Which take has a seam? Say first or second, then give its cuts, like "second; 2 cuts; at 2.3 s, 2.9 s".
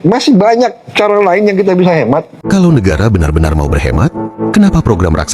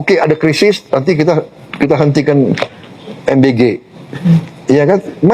first; 1 cut; at 2.3 s